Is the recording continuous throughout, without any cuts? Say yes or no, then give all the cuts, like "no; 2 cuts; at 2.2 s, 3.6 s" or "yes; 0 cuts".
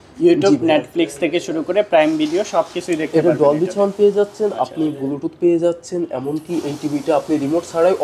yes; 0 cuts